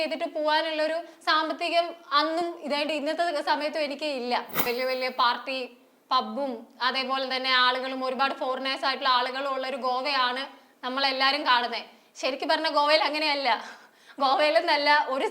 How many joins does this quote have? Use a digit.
1